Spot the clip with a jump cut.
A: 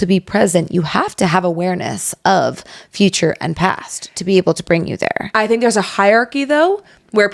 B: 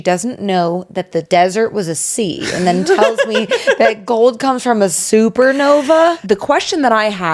B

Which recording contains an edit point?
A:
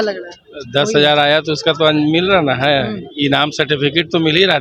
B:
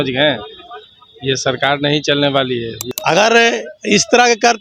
B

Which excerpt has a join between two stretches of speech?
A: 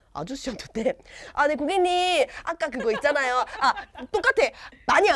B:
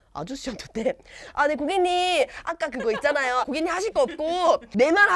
B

